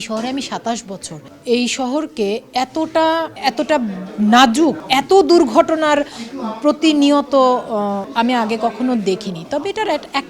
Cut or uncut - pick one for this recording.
uncut